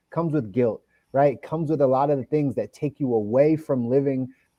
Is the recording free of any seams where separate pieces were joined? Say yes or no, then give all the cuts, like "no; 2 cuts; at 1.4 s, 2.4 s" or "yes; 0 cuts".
yes; 0 cuts